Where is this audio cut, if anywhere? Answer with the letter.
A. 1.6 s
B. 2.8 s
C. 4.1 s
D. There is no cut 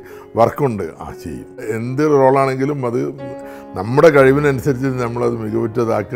A